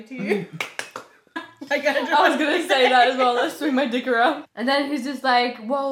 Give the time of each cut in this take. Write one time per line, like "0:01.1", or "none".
0:01.4
0:04.5